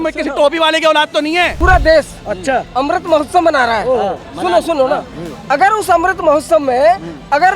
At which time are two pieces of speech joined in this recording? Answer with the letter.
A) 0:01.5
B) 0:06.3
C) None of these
A